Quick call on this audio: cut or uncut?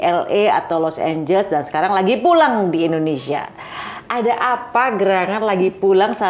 uncut